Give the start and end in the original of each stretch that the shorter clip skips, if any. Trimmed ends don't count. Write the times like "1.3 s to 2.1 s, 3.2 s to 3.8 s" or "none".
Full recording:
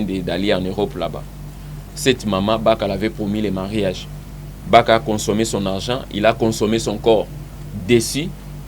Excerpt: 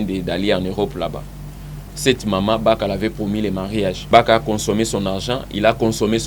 4.0 s to 4.6 s